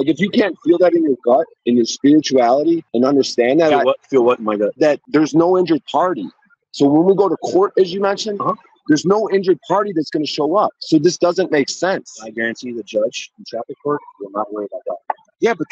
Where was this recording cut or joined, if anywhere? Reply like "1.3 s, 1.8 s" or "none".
1.5 s, 2.9 s, 4.9 s